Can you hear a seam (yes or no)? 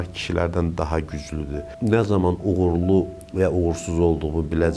yes